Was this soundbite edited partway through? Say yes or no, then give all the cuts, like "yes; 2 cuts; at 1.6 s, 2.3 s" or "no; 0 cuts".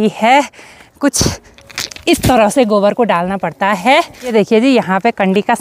no; 0 cuts